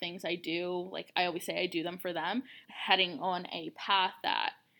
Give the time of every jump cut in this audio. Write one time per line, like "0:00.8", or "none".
0:02.6